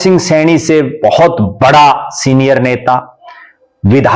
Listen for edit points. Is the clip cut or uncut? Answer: uncut